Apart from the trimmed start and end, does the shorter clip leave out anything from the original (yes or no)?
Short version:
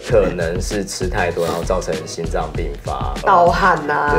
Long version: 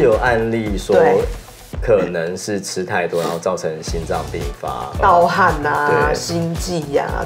no